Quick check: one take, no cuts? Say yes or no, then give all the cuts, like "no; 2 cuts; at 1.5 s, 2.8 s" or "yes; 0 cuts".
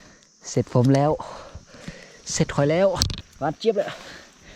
no; 1 cut; at 3.2 s